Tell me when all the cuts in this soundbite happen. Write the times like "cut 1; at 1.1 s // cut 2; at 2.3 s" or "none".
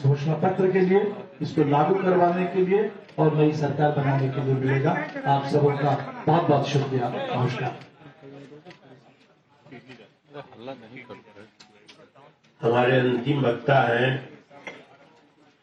none